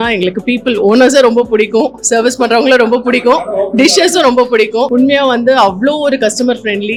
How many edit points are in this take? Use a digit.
0